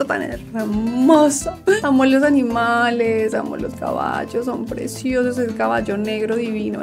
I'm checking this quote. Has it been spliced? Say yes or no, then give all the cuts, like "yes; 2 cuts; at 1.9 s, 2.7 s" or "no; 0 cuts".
no; 0 cuts